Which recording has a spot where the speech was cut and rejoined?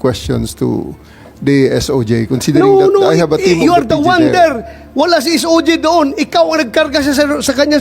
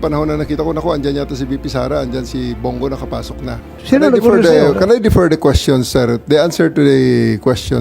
second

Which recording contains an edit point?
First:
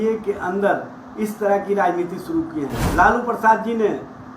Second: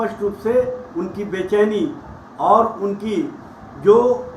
first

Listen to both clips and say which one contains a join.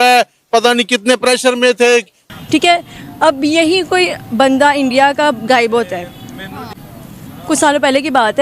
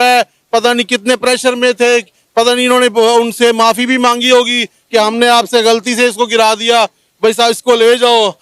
first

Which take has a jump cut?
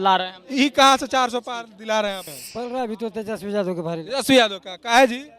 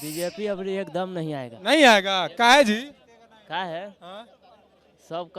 first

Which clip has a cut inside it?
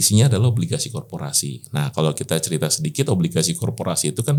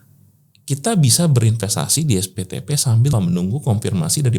second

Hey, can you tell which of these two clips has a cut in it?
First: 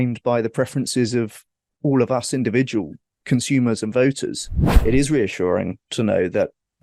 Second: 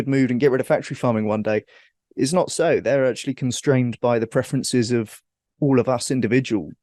first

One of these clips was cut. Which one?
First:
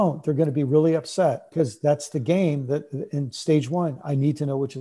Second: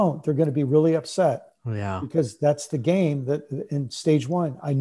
first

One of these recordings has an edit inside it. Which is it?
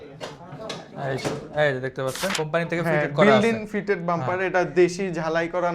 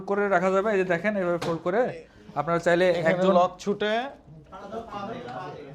first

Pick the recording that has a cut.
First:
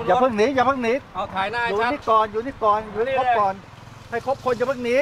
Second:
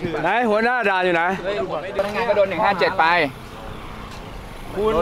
second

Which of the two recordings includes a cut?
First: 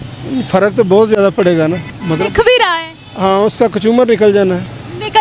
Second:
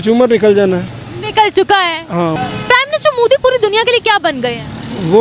second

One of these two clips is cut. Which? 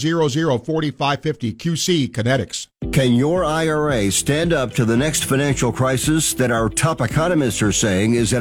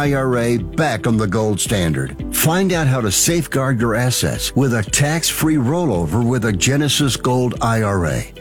first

